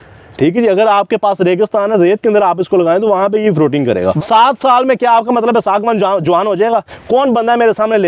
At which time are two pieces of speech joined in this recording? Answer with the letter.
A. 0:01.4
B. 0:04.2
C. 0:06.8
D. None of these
B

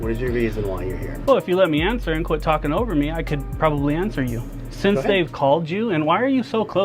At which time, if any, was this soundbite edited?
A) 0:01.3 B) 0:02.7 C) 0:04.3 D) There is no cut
D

